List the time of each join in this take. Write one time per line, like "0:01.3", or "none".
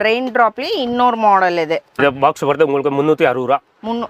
0:02.0